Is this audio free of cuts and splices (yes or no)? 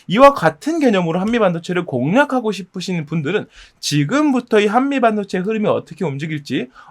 yes